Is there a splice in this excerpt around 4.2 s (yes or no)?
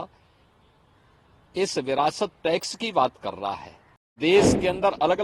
yes